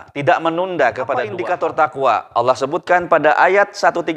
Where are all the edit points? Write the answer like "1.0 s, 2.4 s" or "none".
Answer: 1.3 s